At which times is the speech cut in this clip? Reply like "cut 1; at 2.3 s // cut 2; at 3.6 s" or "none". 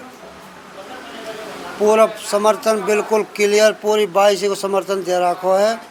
none